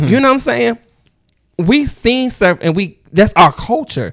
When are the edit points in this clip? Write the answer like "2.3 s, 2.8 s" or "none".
none